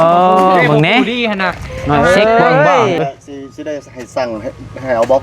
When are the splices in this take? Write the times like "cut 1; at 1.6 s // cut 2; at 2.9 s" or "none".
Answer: cut 1; at 3.0 s